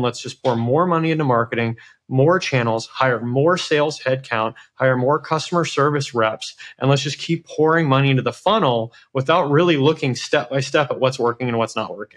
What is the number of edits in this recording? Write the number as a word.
zero